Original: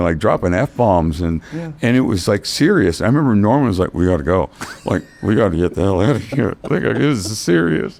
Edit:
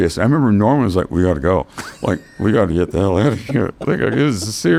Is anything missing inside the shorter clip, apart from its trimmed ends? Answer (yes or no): no